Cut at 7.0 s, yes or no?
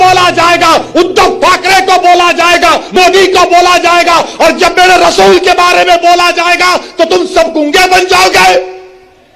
no